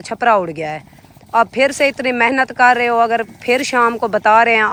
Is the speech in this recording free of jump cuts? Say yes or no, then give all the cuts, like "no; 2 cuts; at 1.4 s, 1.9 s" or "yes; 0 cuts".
yes; 0 cuts